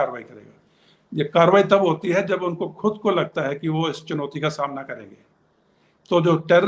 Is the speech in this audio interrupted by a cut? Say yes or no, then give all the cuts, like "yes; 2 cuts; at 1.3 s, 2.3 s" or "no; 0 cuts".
no; 0 cuts